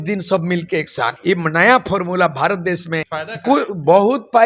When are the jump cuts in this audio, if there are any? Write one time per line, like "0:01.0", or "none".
0:01.2
0:03.1